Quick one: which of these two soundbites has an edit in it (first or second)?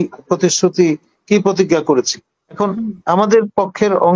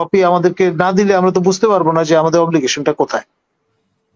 first